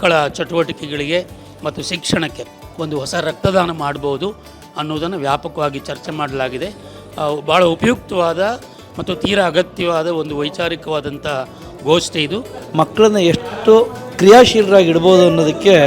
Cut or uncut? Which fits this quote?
cut